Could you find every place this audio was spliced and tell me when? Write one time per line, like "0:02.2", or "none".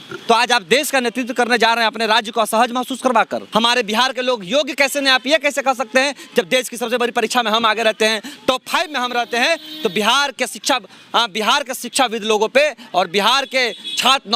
0:03.5